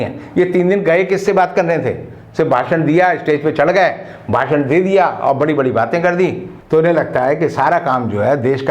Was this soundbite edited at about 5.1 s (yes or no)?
no